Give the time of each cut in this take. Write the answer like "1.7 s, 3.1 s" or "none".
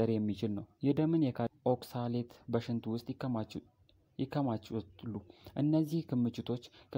1.5 s